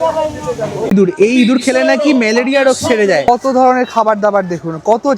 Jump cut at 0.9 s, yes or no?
yes